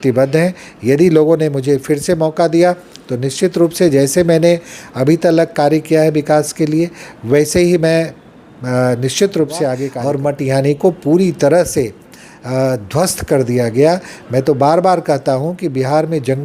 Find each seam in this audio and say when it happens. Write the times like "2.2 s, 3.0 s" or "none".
9.9 s